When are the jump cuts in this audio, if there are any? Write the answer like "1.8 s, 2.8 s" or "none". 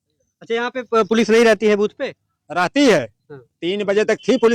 none